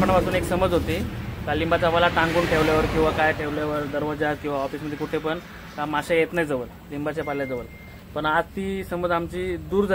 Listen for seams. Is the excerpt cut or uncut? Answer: uncut